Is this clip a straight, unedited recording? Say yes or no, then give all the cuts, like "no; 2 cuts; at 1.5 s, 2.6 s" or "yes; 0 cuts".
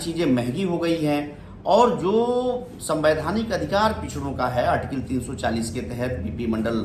yes; 0 cuts